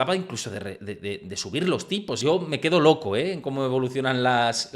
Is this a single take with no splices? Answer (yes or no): no